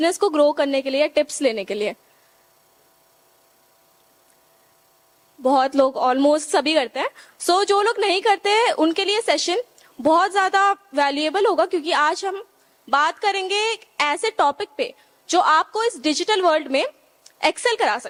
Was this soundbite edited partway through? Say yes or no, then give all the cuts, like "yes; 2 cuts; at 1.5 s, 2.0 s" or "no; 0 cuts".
no; 0 cuts